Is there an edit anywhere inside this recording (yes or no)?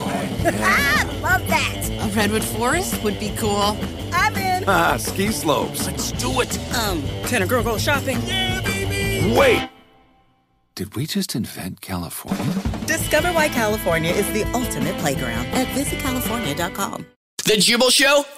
yes